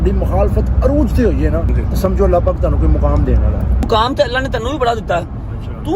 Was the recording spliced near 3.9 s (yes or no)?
yes